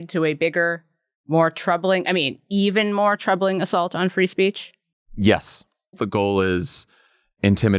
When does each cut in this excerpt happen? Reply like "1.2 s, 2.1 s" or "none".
6.0 s